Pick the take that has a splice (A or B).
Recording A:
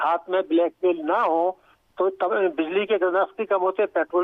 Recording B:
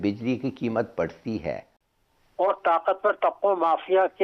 B